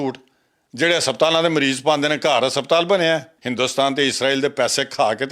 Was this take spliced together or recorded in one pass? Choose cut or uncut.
cut